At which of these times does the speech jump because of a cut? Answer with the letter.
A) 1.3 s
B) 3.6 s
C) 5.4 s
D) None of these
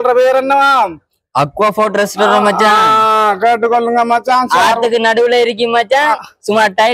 D